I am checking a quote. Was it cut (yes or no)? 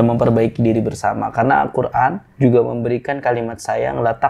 yes